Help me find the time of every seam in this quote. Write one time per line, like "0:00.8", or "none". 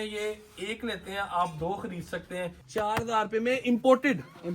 0:02.6